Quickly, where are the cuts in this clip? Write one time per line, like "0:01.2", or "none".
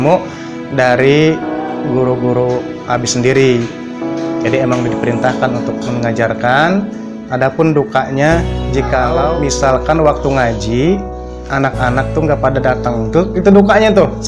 0:09.4

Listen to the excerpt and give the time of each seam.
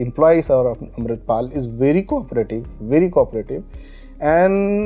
none

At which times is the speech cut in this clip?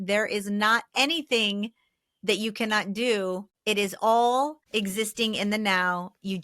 0:03.5
0:04.6

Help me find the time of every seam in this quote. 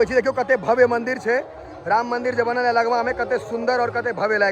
none

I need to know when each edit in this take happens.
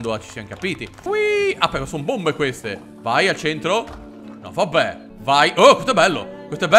0:01.0
0:05.1

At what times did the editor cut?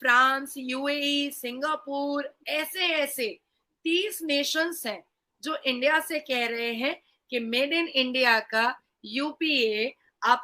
none

